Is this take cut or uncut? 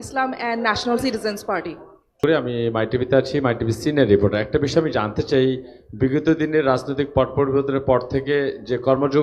cut